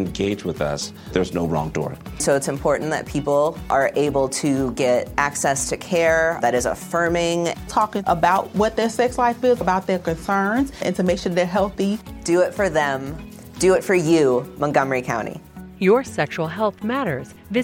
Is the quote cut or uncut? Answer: uncut